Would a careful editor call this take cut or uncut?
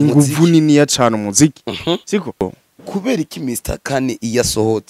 cut